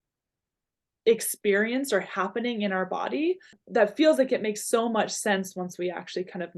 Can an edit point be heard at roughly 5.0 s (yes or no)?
no